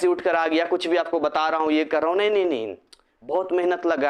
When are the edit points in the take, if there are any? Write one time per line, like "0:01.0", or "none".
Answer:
none